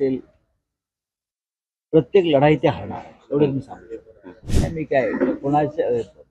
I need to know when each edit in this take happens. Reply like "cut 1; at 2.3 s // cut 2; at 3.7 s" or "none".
cut 1; at 4.5 s